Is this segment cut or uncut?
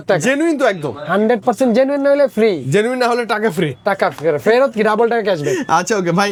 uncut